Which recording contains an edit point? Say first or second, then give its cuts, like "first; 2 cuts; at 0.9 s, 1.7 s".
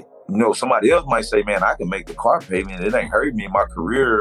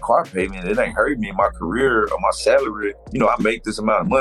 second; 1 cut; at 3.0 s